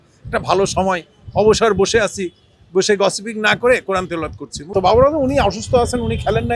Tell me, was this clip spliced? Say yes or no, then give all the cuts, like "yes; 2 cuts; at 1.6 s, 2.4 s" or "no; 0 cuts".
yes; 1 cut; at 4.7 s